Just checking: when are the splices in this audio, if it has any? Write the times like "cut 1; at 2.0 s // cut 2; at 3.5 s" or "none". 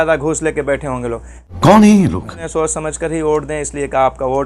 cut 1; at 2.4 s